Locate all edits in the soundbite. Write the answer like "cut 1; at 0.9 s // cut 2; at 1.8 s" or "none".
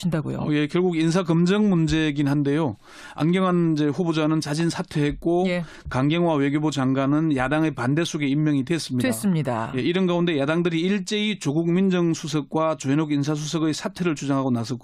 cut 1; at 5.6 s